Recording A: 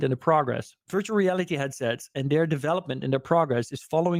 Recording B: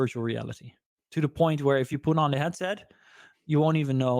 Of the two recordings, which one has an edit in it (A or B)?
B